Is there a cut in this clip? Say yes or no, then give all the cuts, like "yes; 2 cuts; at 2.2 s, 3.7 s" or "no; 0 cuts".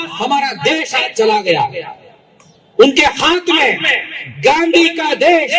no; 0 cuts